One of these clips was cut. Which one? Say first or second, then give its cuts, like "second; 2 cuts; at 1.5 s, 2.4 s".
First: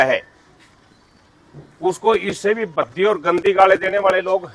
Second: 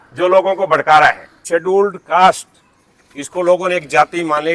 second; 1 cut; at 1.4 s